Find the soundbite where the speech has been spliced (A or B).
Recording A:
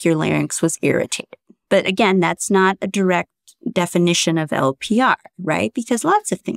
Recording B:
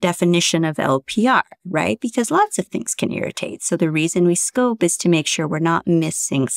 A